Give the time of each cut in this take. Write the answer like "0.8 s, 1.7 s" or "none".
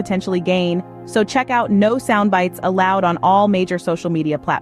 3.7 s